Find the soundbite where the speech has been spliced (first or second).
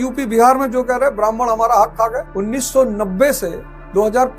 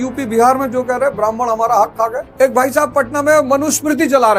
second